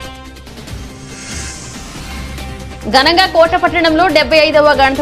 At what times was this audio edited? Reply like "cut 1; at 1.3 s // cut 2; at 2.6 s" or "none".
cut 1; at 2.4 s